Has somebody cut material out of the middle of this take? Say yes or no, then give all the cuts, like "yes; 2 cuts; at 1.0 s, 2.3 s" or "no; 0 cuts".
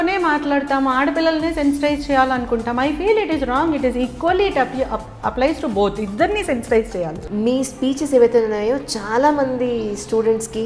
yes; 1 cut; at 7.2 s